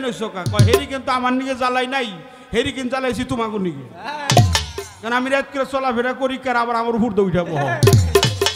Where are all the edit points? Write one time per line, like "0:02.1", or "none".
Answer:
none